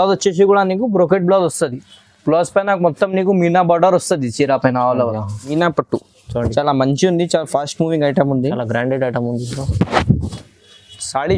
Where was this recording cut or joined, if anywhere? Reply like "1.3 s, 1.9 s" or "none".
5.5 s